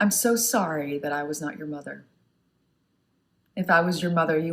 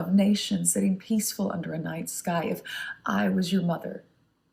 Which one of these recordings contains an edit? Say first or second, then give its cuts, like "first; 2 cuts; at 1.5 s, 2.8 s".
first; 1 cut; at 2.1 s